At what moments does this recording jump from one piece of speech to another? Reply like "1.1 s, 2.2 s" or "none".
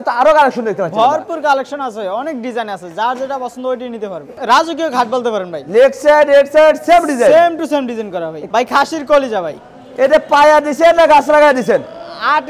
4.3 s, 8.5 s